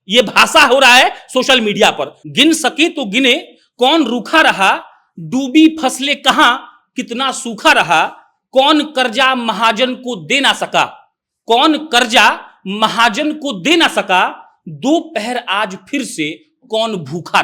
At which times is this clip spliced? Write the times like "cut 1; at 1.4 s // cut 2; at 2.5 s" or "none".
cut 1; at 2.1 s